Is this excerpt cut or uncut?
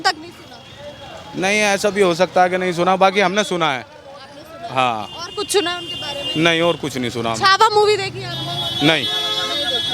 uncut